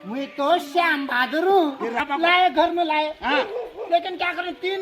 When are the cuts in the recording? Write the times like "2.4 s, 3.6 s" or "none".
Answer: 2.0 s